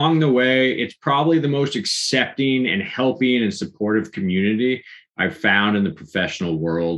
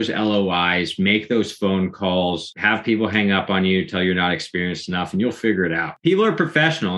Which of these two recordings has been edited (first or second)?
second